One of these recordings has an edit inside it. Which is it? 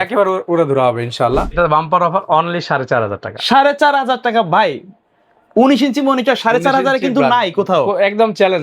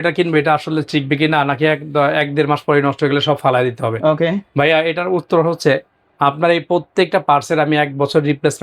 first; 1 cut; at 1.6 s

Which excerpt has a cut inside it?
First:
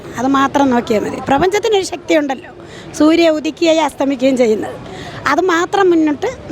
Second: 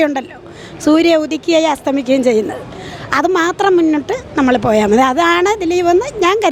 first; 1 cut; at 1.2 s

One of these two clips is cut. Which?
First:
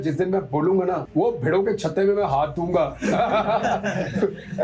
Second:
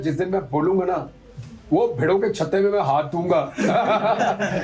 first; 1 cut; at 1.0 s

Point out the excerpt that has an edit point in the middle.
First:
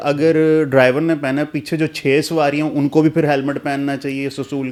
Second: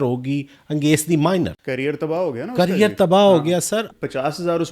second; 2 cuts; at 1.6 s, 3.9 s

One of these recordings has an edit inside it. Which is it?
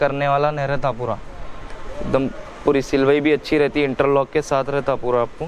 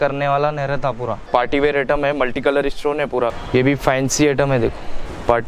second; 2 cuts; at 1.2 s, 3.4 s

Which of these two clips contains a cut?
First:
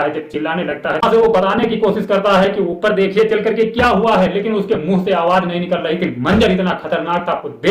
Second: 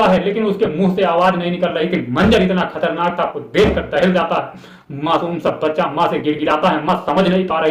first; 1 cut; at 1.0 s

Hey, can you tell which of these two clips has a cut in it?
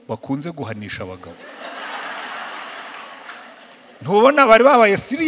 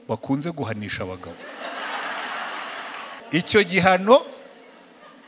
second; 1 cut; at 3.1 s

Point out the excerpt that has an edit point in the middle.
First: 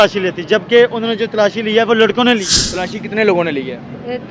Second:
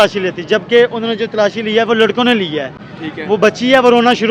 first; 1 cut; at 2.5 s

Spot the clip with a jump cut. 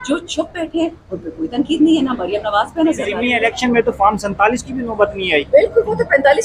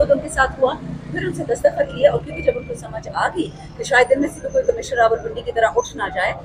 first; 1 cut; at 3.3 s

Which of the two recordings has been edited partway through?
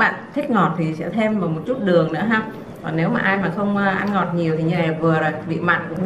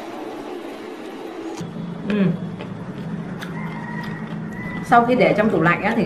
second; 1 cut; at 4.9 s

